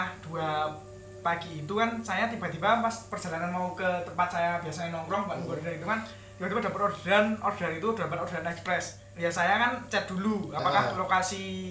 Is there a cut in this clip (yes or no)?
yes